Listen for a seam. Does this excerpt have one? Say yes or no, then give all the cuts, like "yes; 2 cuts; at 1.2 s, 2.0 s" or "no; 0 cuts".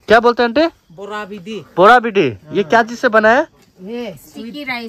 no; 0 cuts